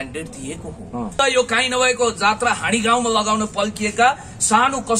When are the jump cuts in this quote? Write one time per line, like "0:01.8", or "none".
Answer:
0:01.2

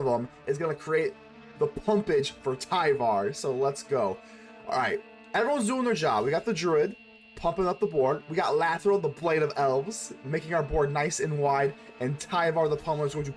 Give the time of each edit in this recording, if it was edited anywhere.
none

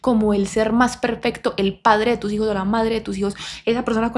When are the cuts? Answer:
none

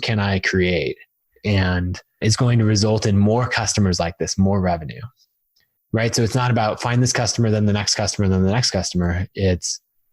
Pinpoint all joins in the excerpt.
0:01.3
0:02.2

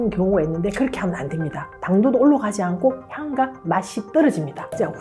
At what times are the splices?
0:01.7

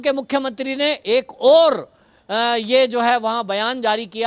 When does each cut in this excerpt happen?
none

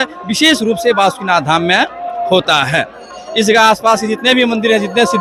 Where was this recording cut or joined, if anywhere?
none

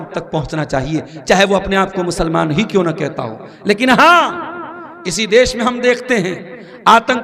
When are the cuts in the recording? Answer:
none

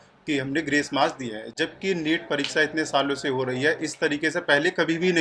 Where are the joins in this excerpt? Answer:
none

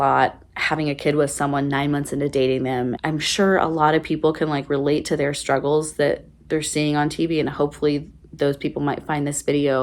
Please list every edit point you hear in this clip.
0:02.9

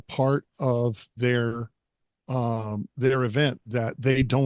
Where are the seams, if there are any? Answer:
none

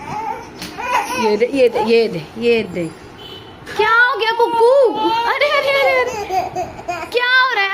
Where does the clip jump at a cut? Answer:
none

